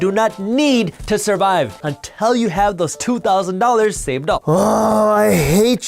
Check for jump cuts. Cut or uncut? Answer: cut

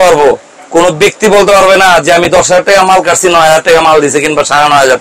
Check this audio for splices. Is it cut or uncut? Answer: uncut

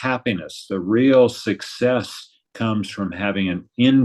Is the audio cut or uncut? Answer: uncut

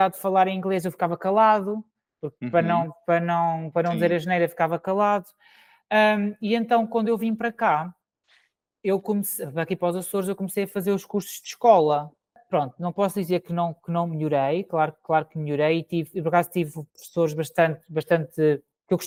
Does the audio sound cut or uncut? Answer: uncut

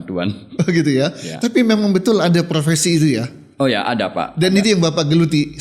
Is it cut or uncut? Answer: uncut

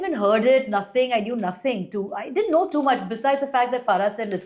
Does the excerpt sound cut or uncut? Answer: uncut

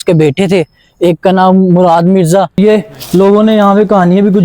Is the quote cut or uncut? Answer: cut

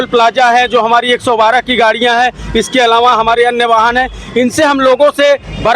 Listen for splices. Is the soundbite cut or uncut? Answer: uncut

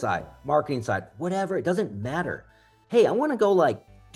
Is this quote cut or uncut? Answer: uncut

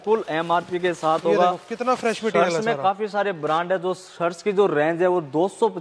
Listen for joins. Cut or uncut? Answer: uncut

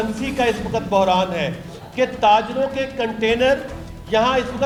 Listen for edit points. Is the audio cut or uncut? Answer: uncut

